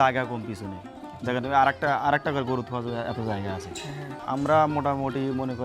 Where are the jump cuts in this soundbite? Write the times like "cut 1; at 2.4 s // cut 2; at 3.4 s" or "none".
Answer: cut 1; at 4.1 s